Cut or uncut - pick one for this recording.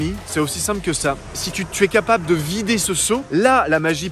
cut